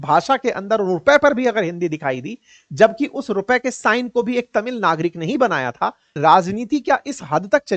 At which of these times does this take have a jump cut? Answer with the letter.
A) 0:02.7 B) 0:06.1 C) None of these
B